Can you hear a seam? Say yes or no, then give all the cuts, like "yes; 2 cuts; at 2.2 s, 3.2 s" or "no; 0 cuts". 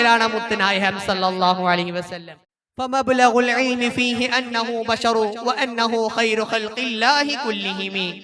yes; 1 cut; at 2.1 s